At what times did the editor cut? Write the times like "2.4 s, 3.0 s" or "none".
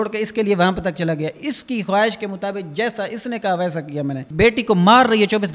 4.2 s